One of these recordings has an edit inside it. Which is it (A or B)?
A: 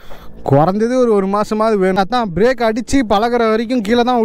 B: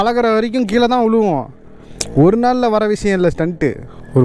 A